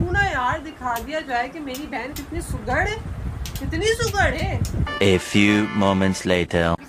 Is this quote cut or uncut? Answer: uncut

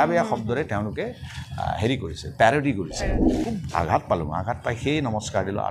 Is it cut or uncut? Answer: cut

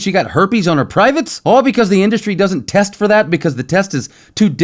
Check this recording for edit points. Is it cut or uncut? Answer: uncut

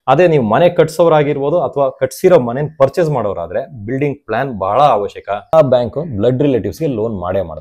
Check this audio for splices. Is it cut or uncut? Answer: cut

